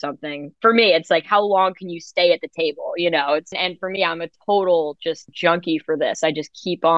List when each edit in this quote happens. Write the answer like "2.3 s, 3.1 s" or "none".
3.5 s, 5.3 s